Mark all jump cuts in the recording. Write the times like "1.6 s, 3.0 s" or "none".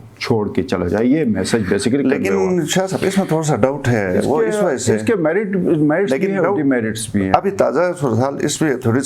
none